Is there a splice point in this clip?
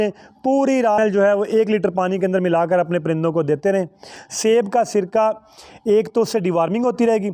yes; 1 cut; at 1.0 s

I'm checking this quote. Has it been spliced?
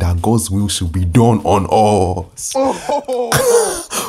no; 0 cuts

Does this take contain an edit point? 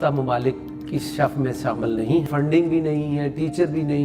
yes; 1 cut; at 2.3 s

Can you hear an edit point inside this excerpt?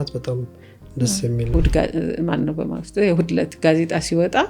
yes; 1 cut; at 1.5 s

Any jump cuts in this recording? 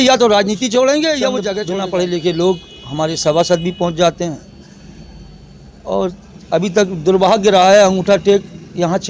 yes; 1 cut; at 1.6 s

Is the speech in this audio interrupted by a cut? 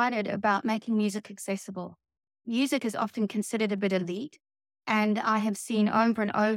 yes; 1 cut; at 2.4 s

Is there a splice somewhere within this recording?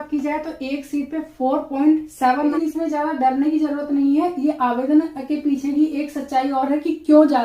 yes; 1 cut; at 2.5 s

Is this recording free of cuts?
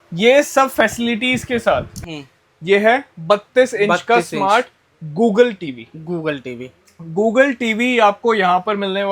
no; 1 cut; at 2.0 s

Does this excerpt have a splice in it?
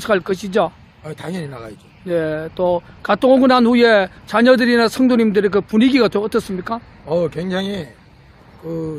no; 0 cuts

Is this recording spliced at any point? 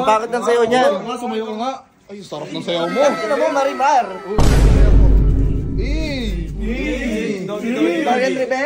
no; 0 cuts

